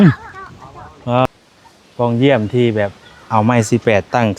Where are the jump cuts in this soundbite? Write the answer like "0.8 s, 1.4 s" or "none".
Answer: 1.3 s